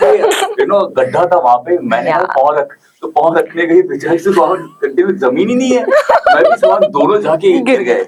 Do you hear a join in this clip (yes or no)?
no